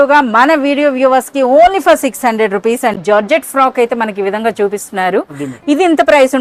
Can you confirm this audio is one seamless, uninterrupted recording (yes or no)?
no